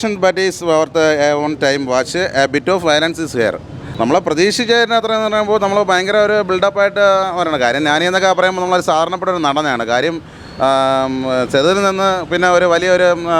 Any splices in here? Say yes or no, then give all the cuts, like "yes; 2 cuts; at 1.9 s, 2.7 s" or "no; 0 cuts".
no; 0 cuts